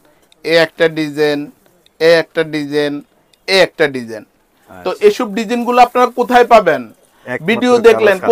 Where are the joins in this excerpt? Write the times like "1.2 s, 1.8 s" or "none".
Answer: none